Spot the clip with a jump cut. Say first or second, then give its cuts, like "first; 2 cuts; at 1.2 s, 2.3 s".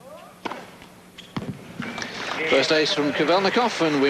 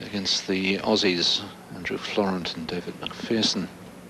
second; 1 cut; at 1.1 s